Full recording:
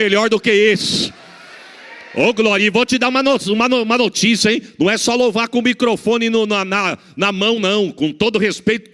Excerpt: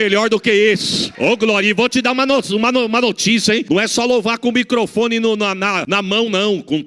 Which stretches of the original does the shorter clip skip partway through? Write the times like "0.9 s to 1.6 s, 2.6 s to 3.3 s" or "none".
1.0 s to 2.0 s, 4.6 s to 4.7 s, 6.9 s to 7.1 s